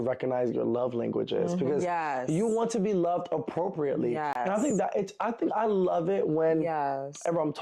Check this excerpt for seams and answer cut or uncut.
uncut